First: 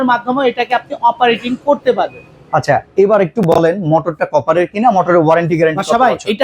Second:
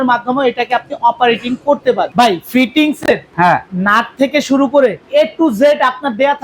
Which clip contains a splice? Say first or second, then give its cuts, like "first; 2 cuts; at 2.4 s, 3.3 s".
second; 3 cuts; at 2.1 s, 3.3 s, 5.0 s